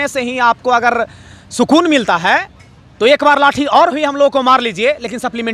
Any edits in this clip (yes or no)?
no